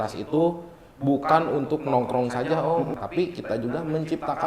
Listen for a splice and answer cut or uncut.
cut